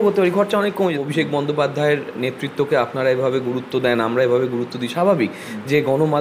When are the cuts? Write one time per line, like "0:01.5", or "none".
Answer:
0:01.0